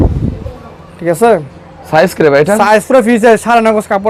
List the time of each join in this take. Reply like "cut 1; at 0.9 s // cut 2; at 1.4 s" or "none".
none